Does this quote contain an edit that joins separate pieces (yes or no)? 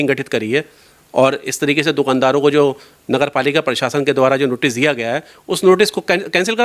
no